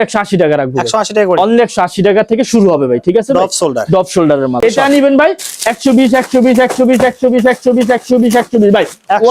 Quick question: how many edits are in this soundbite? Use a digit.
1